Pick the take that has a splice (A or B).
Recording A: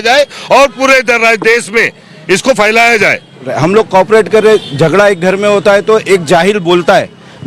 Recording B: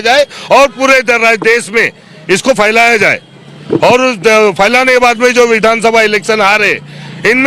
A